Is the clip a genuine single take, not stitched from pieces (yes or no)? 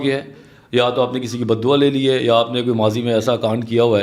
yes